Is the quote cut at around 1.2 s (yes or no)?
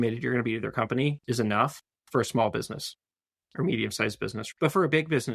yes